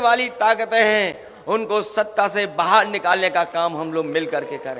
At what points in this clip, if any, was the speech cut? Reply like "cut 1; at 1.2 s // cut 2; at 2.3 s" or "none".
none